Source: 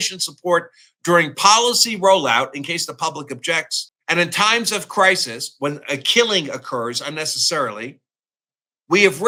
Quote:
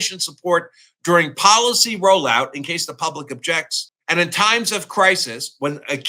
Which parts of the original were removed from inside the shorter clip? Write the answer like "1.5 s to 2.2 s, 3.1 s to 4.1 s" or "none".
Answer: none